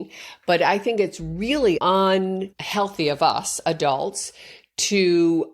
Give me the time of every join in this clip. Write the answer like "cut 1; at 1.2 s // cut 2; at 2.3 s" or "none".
cut 1; at 1.8 s // cut 2; at 2.6 s